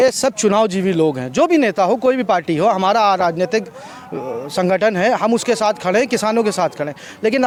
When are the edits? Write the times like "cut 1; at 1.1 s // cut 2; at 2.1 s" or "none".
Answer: none